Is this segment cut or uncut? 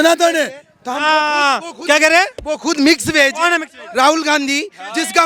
uncut